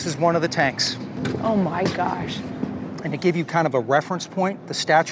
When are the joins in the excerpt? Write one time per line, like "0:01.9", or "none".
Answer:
0:02.9

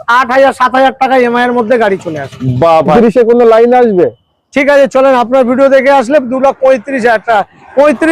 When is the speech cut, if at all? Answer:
0:02.9

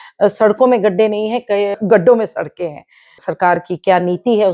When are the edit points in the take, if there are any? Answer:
0:01.8
0:03.2

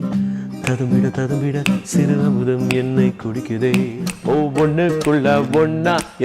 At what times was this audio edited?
0:04.1

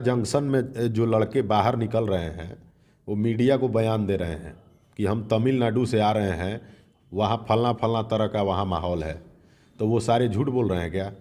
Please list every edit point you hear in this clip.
none

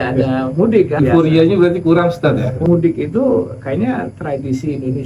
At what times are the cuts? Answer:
0:01.0
0:02.6

